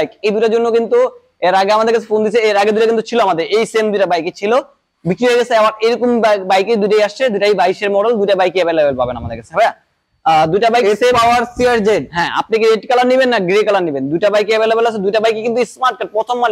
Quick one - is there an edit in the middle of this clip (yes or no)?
no